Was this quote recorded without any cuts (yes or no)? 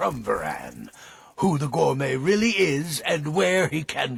yes